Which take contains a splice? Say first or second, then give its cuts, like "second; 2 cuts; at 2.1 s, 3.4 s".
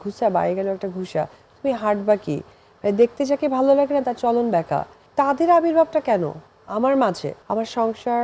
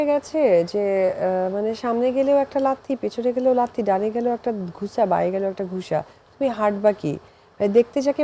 first; 2 cuts; at 5.0 s, 7.3 s